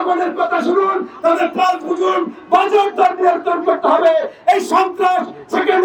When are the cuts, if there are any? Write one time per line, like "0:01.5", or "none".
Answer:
none

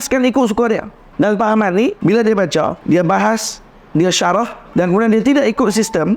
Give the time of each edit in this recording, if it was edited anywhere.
0:01.0
0:02.0
0:02.8
0:04.6

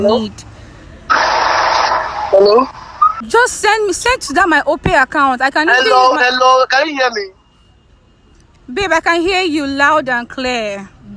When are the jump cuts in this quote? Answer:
0:03.2

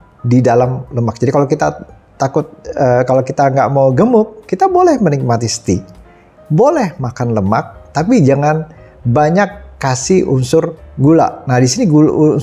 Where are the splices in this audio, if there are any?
none

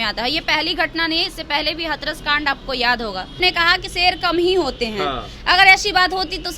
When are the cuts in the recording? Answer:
0:03.4

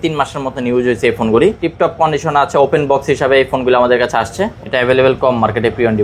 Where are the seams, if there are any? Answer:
0:01.6
0:04.5

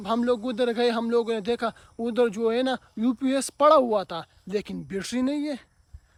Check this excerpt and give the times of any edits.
none

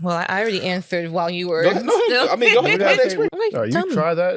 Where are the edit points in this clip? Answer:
0:03.3

